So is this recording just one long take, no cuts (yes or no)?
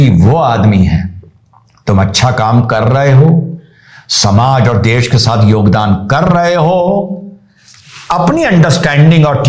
yes